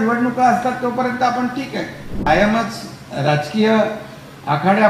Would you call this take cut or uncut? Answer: cut